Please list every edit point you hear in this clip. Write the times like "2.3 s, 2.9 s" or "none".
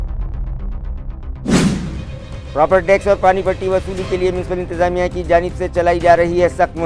2.0 s

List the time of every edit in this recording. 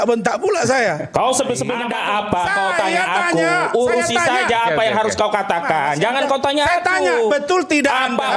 1.8 s

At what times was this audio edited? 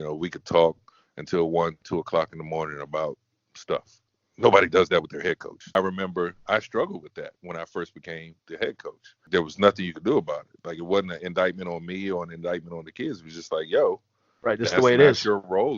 5.8 s, 9.3 s

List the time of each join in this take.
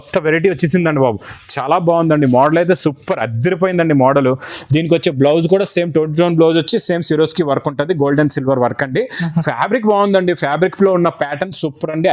none

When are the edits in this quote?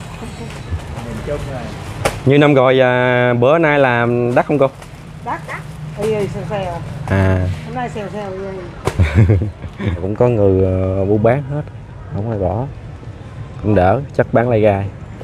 10.1 s

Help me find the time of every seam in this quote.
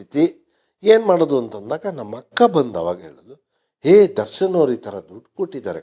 none

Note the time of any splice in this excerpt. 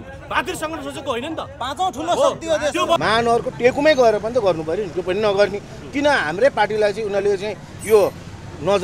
3.0 s

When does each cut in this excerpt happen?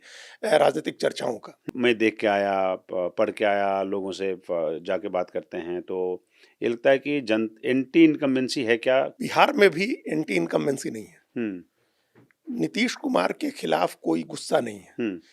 1.6 s, 9.1 s

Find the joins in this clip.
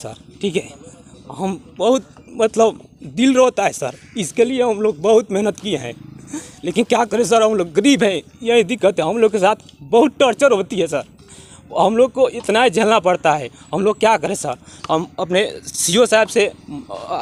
none

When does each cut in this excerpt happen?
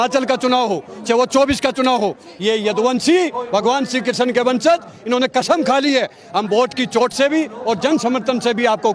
none

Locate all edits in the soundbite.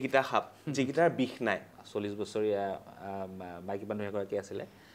1.7 s

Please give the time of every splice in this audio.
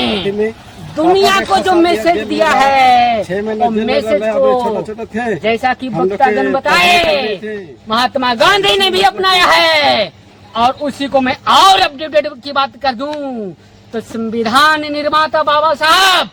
none

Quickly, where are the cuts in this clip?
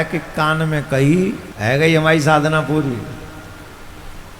1.5 s

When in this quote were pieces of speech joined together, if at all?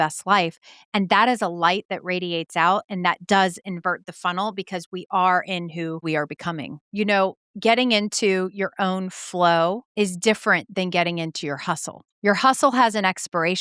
6.5 s

